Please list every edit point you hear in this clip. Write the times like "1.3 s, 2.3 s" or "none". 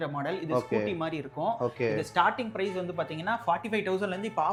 none